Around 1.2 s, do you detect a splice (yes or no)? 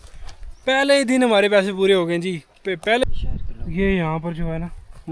no